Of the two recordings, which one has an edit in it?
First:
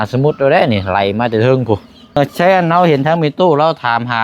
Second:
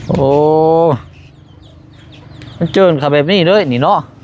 first; 1 cut; at 2.2 s

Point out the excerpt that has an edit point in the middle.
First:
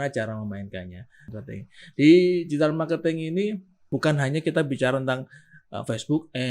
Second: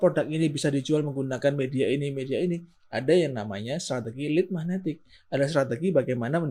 first; 2 cuts; at 1.3 s, 3.9 s

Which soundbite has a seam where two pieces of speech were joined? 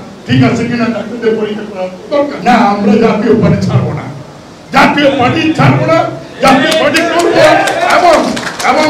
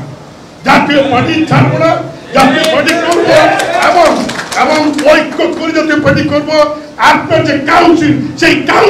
first; 1 cut; at 2.4 s

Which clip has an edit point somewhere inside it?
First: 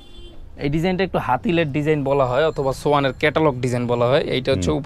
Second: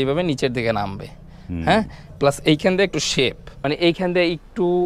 second; 1 cut; at 3.5 s

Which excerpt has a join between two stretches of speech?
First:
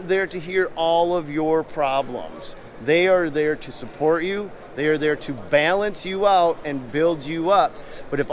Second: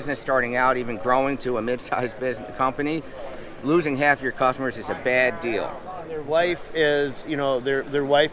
second; 1 cut; at 6.2 s

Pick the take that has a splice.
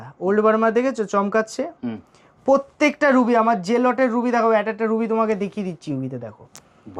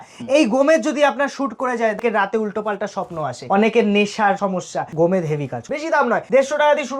second; 4 cuts; at 2.0 s, 3.4 s, 4.5 s, 5.9 s

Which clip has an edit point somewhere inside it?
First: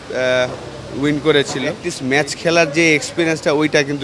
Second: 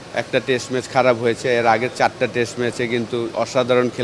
first; 1 cut; at 1.9 s

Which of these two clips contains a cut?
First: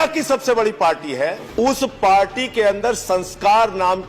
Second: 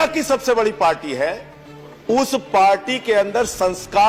first; 1 cut; at 1.4 s

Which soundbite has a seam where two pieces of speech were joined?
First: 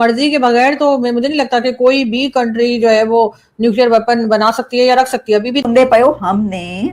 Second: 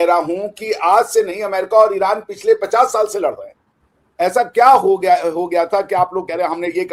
first; 1 cut; at 5.6 s

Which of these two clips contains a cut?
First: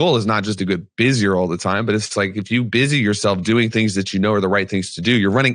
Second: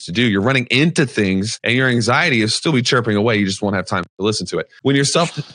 second; 2 cuts; at 1.6 s, 4.7 s

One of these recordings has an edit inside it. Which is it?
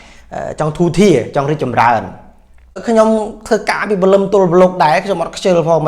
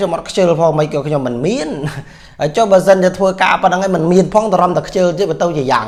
first; 1 cut; at 2.8 s

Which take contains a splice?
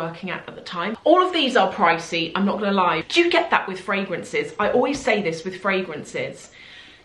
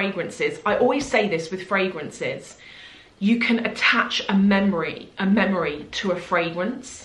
first; 2 cuts; at 1.0 s, 3.0 s

